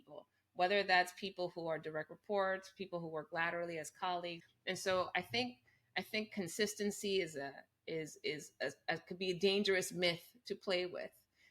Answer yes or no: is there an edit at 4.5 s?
yes